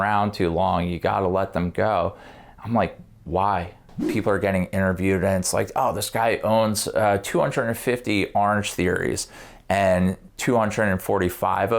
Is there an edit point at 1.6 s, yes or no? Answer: no